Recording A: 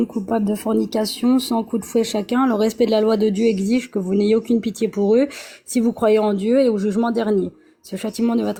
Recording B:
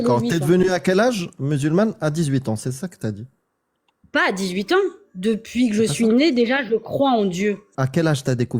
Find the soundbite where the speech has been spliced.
B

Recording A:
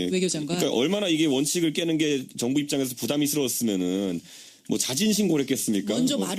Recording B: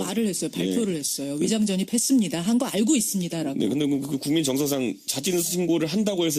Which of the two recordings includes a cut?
A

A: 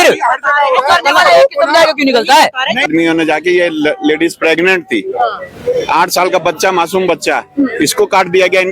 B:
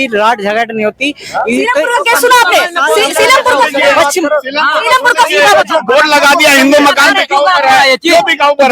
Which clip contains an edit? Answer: A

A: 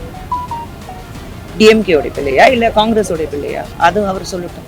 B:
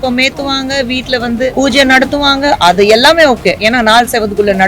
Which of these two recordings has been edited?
B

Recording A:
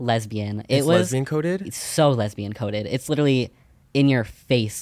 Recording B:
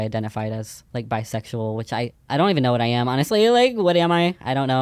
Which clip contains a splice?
B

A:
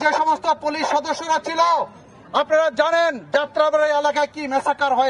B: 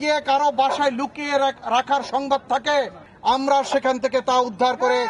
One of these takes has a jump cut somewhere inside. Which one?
B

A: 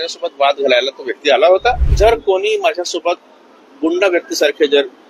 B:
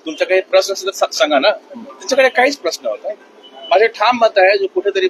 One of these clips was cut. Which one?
A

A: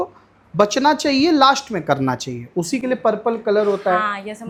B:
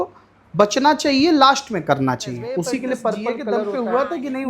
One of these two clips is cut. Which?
B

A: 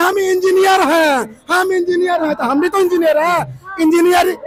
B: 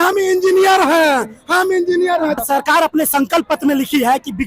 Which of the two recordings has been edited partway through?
B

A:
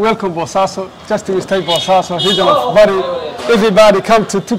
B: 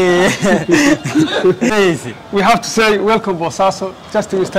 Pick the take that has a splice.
B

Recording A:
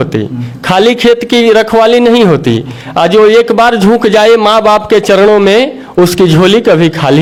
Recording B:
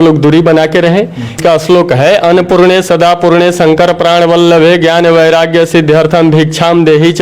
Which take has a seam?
B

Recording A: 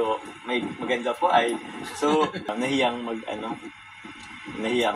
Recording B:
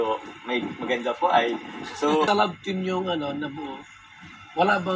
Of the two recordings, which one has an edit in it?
B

